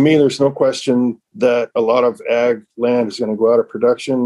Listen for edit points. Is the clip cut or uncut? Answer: cut